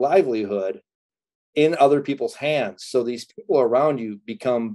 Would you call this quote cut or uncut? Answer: uncut